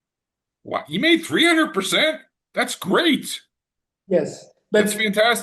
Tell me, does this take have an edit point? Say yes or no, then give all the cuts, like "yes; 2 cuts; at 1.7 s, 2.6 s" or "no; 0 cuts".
no; 0 cuts